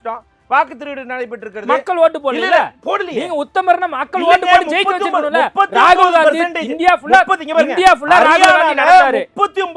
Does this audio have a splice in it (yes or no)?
no